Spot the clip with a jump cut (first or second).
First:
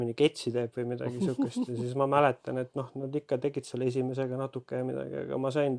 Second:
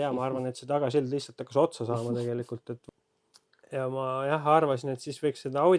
second